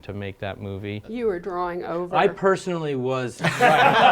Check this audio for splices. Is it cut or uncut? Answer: cut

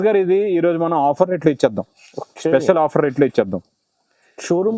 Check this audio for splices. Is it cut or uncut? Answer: uncut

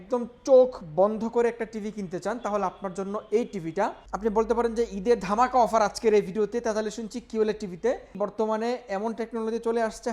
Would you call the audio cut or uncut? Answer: cut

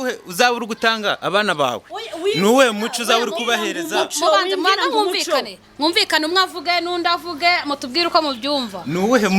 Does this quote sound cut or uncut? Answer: uncut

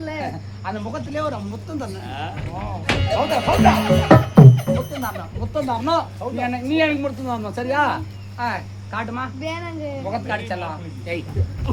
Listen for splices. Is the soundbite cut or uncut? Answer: uncut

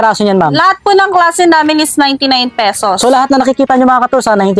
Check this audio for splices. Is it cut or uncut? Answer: uncut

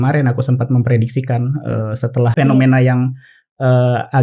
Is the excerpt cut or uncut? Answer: cut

